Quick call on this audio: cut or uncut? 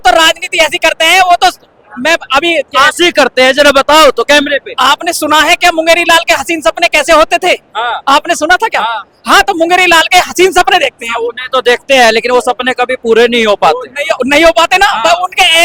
uncut